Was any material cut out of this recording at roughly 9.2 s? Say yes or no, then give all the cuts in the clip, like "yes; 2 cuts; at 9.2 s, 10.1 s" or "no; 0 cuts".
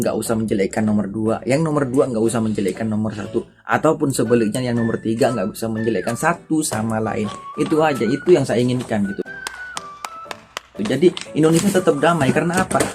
no; 0 cuts